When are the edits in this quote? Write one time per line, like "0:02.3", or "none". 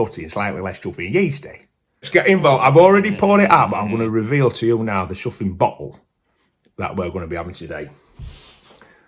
0:02.1